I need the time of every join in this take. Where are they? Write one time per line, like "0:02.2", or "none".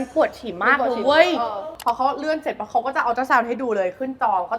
none